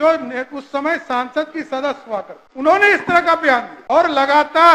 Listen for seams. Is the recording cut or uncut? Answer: cut